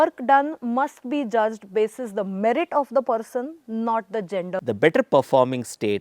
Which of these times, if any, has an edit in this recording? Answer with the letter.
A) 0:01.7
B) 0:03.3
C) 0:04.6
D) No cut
C